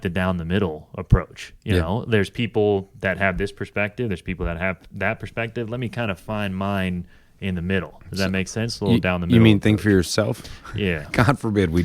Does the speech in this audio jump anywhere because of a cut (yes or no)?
no